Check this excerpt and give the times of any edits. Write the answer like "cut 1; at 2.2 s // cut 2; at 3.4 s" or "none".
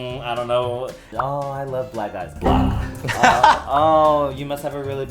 cut 1; at 1.0 s